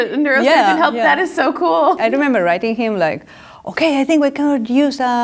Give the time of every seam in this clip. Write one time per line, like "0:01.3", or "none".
0:02.0